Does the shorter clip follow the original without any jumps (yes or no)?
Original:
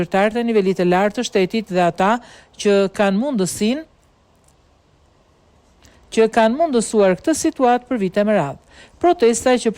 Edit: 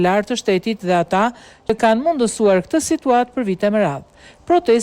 no